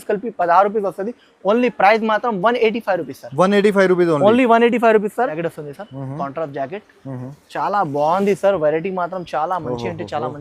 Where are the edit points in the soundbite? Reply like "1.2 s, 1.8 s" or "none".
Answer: 5.3 s